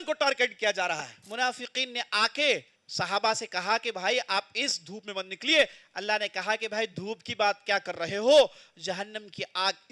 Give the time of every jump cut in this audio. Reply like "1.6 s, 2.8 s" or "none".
1.2 s, 2.8 s

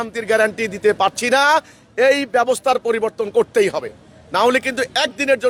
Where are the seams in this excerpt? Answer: none

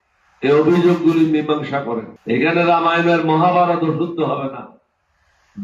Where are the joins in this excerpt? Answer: 2.1 s

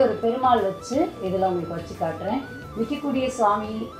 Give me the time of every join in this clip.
none

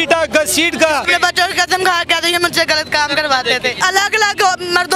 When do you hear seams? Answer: 1.0 s, 3.8 s

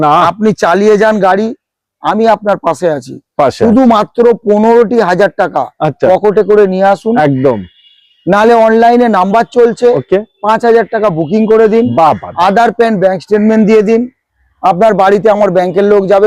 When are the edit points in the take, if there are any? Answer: none

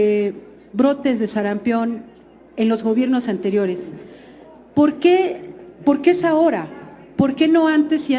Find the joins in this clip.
none

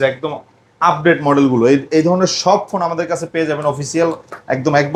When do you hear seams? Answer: none

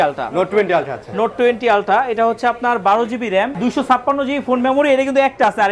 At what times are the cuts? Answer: 3.5 s

